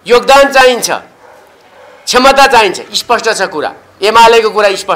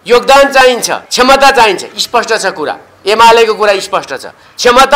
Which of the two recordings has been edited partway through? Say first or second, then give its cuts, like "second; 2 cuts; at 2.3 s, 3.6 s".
second; 1 cut; at 1.0 s